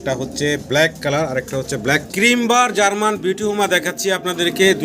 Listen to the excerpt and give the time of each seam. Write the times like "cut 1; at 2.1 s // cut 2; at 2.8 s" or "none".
cut 1; at 2.0 s